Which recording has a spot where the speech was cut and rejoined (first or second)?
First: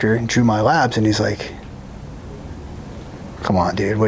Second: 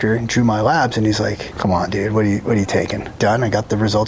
second